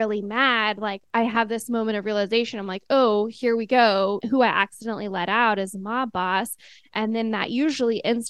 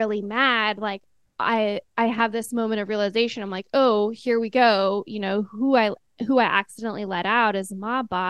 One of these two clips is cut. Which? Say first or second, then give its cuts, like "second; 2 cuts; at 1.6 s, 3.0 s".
first; 2 cuts; at 1.0 s, 4.2 s